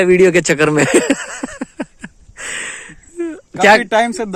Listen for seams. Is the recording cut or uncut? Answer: uncut